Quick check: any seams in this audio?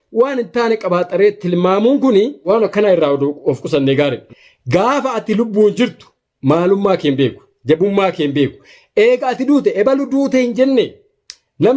yes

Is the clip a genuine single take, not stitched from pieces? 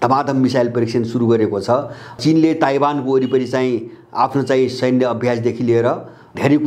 no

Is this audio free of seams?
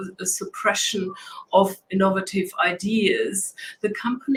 yes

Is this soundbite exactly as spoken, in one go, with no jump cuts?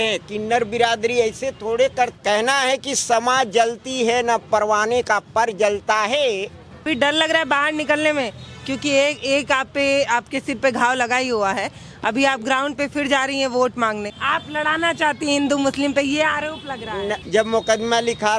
no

